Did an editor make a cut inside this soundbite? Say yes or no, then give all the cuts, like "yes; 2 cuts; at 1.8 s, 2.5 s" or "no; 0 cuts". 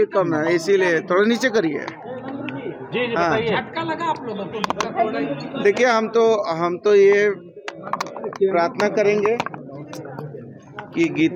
no; 0 cuts